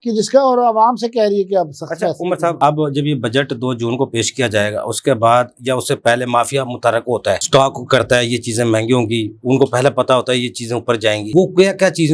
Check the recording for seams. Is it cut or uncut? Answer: uncut